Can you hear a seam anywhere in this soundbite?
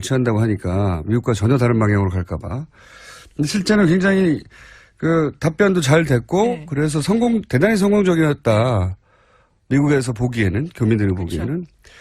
yes; 1 cut; at 8.9 s

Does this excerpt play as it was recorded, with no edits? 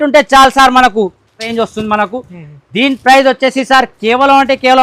no; 1 cut; at 1.5 s

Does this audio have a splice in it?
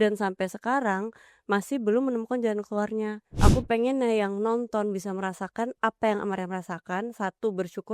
yes; 1 cut; at 3.2 s

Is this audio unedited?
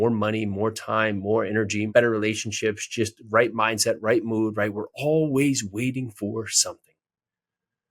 no; 1 cut; at 1.9 s

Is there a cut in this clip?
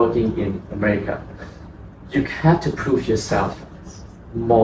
no; 0 cuts

